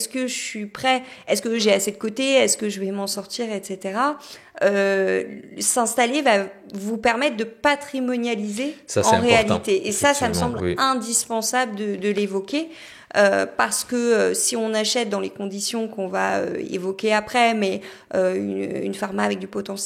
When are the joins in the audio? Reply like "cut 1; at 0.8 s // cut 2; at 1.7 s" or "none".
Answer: none